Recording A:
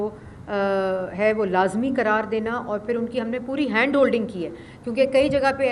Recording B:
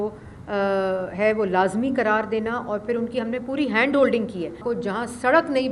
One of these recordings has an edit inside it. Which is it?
B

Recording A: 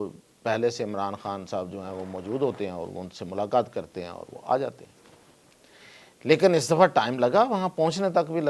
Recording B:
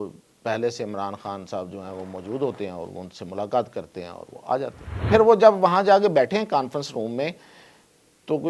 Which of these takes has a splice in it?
B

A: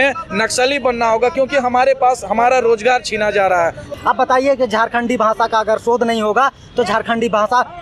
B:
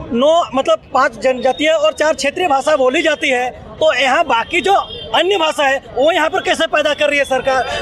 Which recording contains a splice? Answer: A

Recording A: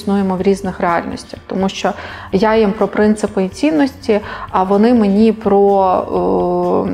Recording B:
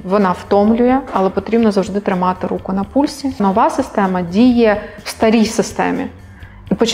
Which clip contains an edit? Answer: B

